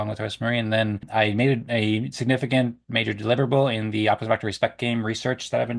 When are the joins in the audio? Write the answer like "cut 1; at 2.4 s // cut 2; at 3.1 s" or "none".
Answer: cut 1; at 1.0 s